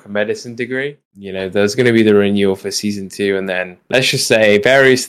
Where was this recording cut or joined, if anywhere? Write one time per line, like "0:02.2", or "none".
0:01.1